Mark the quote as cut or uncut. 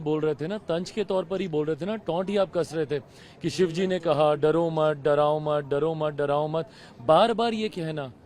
uncut